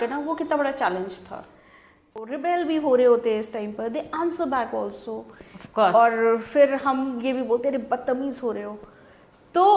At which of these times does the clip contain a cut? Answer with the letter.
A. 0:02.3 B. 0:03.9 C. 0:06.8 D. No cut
A